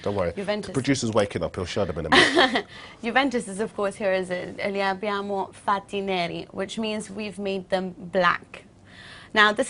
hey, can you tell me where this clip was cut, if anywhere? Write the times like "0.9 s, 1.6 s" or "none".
none

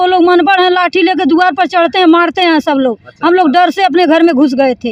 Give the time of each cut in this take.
none

